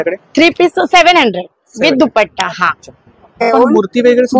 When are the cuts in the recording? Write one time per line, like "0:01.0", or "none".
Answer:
0:03.5